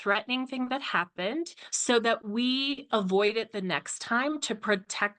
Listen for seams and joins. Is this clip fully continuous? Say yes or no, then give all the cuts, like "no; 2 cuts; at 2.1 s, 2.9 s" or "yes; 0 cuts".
yes; 0 cuts